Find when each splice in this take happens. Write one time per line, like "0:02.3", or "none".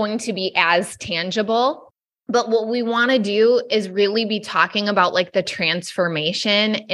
none